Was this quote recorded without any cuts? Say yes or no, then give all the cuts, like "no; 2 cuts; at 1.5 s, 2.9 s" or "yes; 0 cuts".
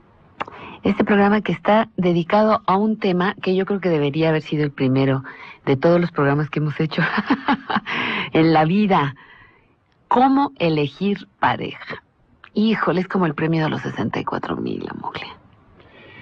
yes; 0 cuts